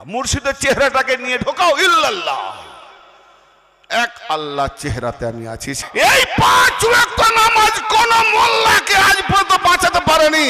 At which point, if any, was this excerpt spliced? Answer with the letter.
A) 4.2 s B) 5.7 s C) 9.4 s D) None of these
B